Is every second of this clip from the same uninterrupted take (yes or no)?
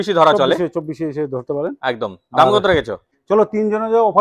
no